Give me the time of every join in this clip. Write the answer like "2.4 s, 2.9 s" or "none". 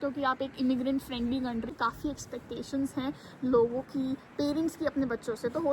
1.7 s